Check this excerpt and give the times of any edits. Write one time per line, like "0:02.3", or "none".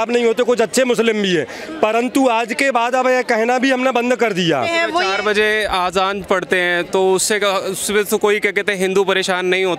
0:04.7